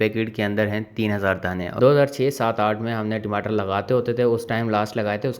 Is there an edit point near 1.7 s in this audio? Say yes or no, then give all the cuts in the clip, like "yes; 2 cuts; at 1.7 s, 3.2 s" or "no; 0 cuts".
yes; 1 cut; at 1.7 s